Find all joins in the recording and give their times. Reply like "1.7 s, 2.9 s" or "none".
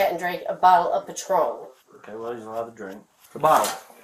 3.1 s